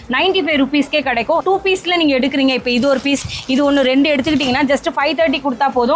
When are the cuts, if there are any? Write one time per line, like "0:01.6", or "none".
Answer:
0:01.4